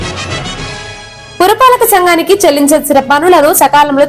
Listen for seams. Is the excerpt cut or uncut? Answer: cut